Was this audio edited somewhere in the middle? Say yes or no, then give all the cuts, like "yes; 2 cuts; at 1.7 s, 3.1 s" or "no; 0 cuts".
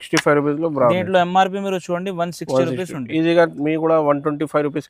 no; 0 cuts